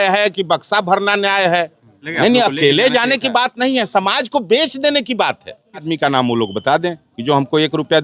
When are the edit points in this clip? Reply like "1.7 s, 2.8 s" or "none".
2.0 s, 5.8 s

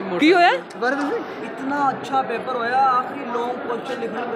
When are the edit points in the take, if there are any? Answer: none

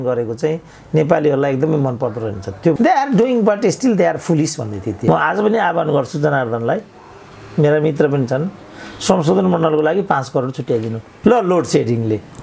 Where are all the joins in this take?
2.8 s, 5.0 s, 11.0 s

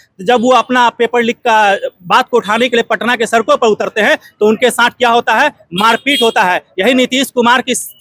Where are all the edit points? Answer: none

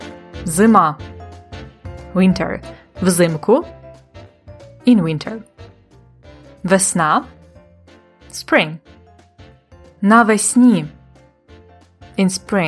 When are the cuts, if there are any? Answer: none

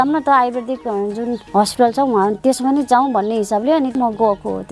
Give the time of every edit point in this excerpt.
1.5 s, 3.9 s

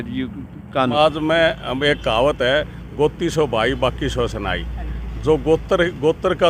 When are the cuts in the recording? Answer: 0.9 s

